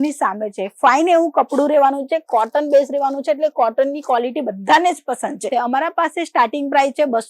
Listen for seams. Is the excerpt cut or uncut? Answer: cut